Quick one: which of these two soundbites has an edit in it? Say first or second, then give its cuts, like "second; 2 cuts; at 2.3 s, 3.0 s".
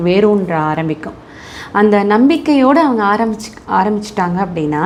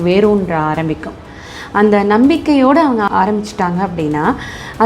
second; 1 cut; at 3.1 s